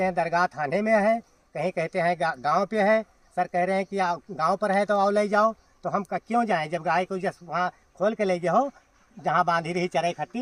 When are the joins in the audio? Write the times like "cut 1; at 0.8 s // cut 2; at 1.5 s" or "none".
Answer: none